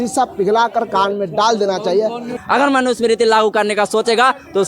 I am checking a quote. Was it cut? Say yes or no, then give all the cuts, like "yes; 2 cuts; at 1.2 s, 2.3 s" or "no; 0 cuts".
yes; 1 cut; at 2.3 s